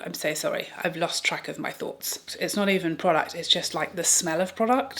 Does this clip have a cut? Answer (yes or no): yes